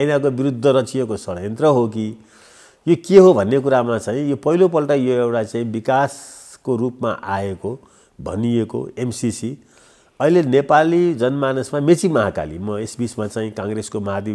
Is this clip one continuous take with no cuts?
yes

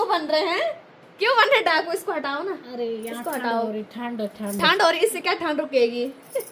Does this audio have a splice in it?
no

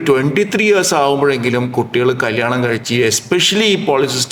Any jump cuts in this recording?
no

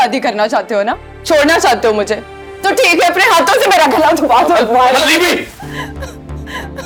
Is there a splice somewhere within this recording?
no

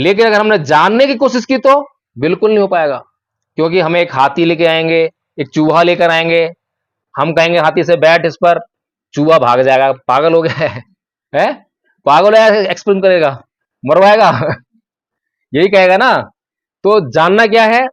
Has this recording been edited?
no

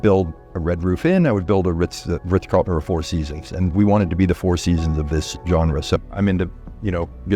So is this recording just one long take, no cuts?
no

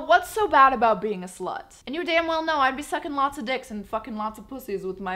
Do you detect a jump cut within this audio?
yes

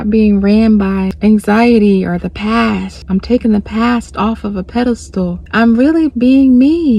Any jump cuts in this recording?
yes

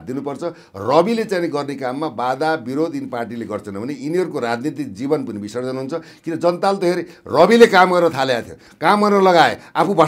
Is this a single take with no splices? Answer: yes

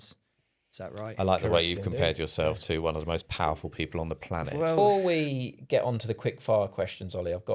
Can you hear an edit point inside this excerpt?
yes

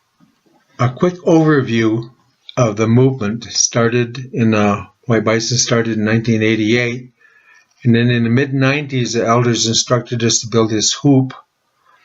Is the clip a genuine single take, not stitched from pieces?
yes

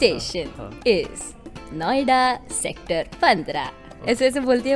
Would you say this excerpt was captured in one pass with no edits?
yes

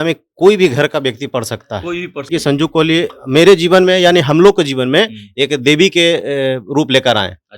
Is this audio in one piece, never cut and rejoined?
no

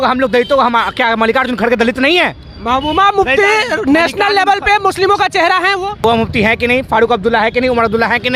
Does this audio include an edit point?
yes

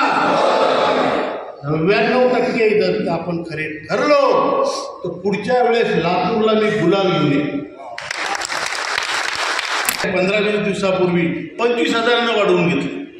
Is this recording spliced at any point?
yes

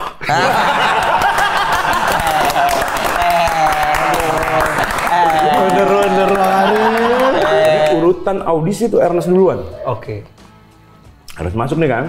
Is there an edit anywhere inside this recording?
yes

